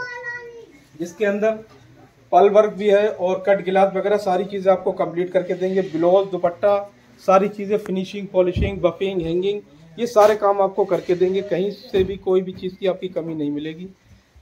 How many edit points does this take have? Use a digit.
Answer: 0